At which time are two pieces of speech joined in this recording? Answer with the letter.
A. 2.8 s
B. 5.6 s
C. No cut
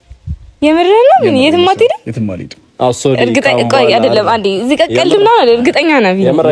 C